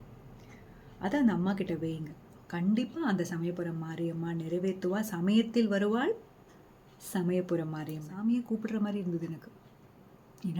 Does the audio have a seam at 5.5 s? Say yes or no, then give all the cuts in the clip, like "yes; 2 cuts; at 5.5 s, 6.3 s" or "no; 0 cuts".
no; 1 cut; at 8.1 s